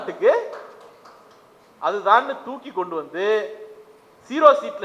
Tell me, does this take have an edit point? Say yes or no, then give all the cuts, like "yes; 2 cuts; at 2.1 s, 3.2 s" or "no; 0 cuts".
no; 0 cuts